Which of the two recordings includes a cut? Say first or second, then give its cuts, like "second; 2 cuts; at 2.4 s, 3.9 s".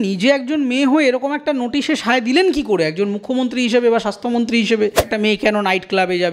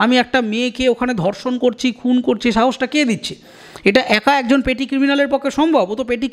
first; 1 cut; at 5.0 s